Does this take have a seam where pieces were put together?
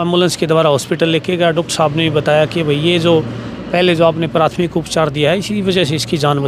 no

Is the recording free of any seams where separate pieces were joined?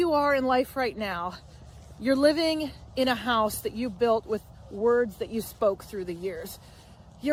yes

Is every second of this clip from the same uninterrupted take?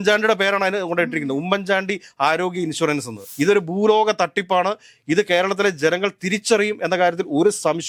yes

